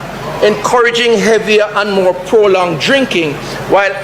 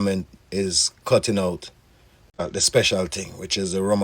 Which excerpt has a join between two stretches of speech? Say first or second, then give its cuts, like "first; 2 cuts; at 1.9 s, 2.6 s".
second; 1 cut; at 2.4 s